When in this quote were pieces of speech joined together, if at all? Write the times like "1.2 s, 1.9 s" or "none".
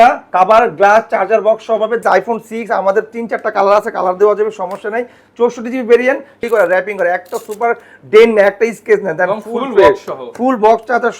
2.0 s, 6.4 s

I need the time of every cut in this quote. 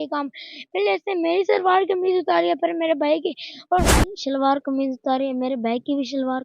4.0 s

